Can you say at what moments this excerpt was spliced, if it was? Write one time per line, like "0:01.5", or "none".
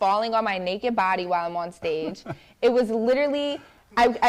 none